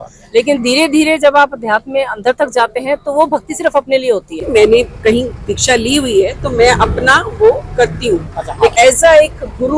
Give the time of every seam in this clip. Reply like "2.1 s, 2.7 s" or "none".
4.4 s, 8.7 s